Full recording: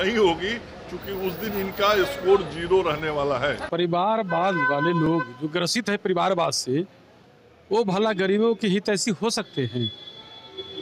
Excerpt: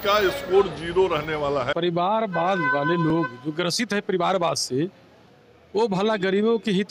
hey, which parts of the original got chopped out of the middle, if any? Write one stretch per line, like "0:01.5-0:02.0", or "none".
0:03.5-0:03.7